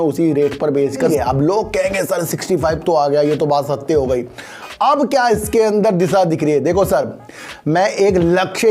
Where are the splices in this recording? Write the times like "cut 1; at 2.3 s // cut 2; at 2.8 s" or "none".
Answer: cut 1; at 1.0 s